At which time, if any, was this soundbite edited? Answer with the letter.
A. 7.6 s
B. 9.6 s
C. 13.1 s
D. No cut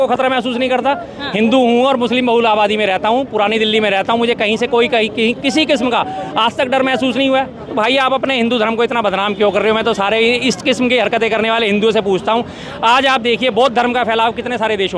A